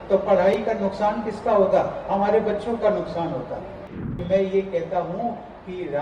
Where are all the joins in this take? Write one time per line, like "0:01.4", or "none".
0:03.8